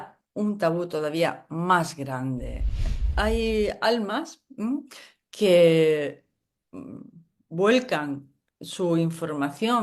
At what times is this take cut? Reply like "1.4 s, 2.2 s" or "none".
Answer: 2.8 s